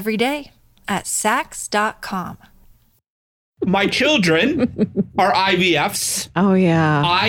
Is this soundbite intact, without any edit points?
no; 1 cut; at 3.5 s

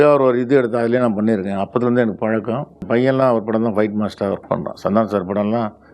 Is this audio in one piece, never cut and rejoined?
no; 1 cut; at 2.8 s

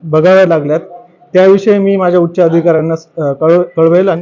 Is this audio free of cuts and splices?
yes; 0 cuts

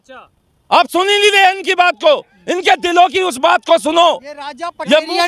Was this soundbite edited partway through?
no; 0 cuts

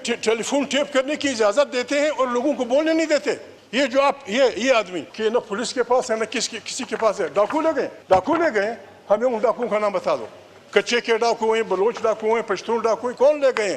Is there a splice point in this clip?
yes; 3 cuts; at 3.6 s, 5.0 s, 8.0 s

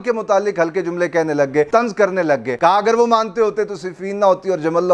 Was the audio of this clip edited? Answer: yes; 2 cuts; at 1.7 s, 2.5 s

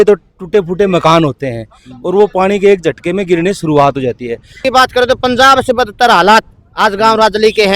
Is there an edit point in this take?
yes; 1 cut; at 4.6 s

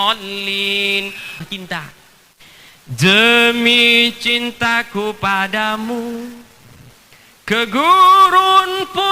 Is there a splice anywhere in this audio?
yes; 1 cut; at 1.4 s

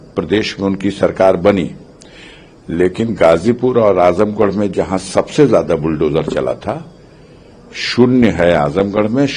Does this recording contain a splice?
no; 0 cuts

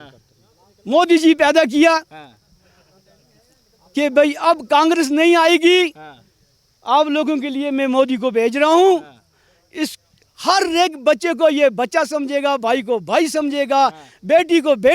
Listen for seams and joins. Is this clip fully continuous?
yes; 0 cuts

